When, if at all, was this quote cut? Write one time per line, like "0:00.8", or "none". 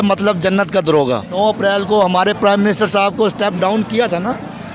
0:01.3

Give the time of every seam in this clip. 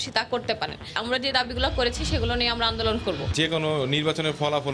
0:00.9
0:03.3

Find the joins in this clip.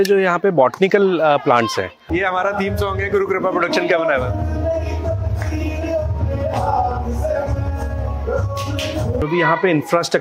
0:02.0
0:09.2

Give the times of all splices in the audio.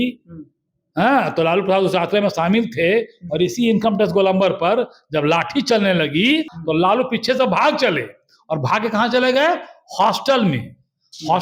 0:06.5

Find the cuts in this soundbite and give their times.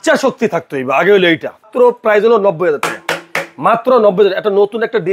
0:01.7

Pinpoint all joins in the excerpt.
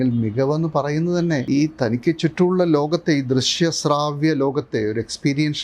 0:01.4

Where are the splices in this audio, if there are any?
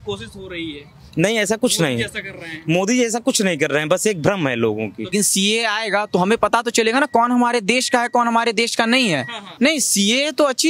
0:05.1
0:09.4

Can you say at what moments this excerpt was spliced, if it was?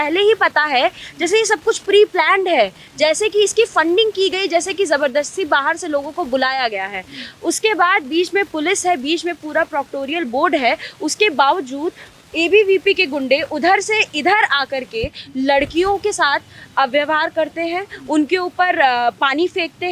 none

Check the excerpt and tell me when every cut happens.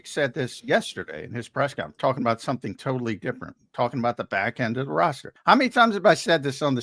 0:05.3

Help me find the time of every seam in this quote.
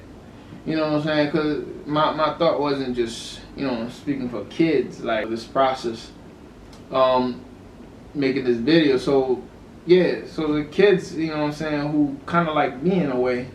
0:05.3

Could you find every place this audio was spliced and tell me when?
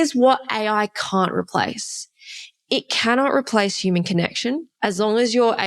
0:04.7

